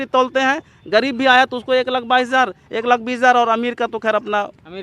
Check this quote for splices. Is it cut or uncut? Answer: uncut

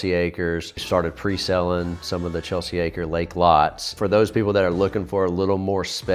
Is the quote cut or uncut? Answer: cut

